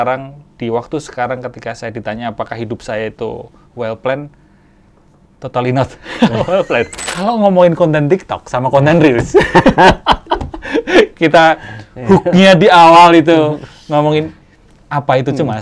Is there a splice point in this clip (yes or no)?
yes